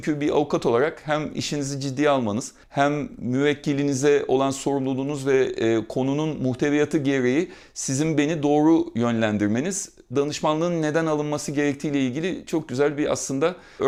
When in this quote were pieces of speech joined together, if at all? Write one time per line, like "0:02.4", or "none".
none